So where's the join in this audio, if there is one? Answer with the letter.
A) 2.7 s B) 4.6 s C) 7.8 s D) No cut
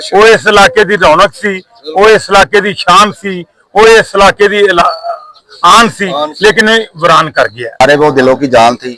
C